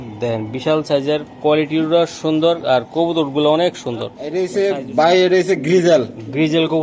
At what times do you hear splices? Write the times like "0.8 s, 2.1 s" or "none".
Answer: 4.2 s